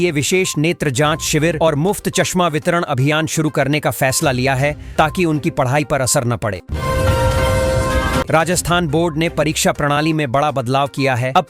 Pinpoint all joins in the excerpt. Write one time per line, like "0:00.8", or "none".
0:06.6
0:08.3